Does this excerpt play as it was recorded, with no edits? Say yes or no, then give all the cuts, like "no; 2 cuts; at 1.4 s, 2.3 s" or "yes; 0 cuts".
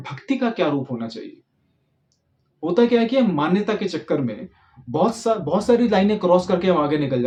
yes; 0 cuts